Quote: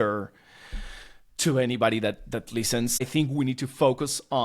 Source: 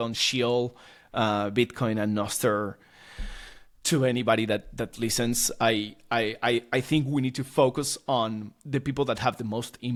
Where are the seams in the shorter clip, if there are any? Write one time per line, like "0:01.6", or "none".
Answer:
0:03.1